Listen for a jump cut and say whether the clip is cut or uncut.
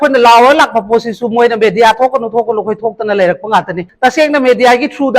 cut